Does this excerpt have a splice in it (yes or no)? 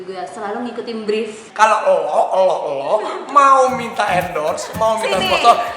yes